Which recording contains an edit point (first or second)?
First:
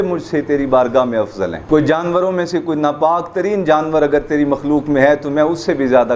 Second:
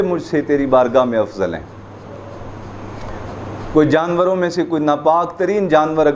first